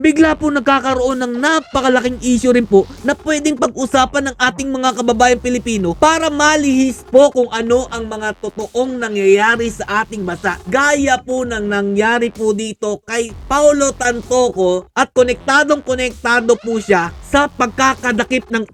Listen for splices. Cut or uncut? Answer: uncut